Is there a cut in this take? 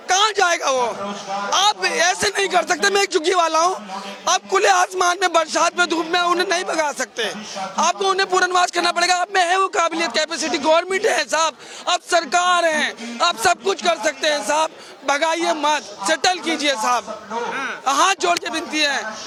no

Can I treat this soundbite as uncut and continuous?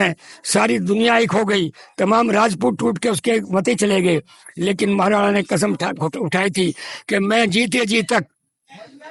yes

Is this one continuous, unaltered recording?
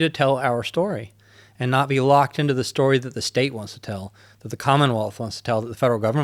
yes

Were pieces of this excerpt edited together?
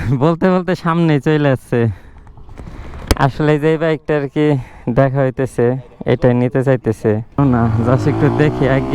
yes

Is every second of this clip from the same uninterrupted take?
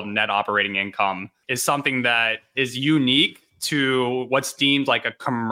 no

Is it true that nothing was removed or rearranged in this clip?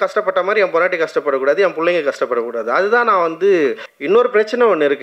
no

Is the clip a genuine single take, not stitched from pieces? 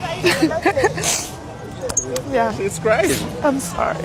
yes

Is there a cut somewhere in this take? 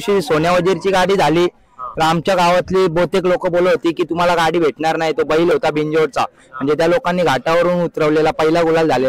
no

